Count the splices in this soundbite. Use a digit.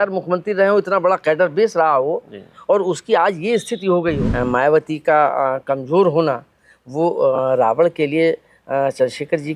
1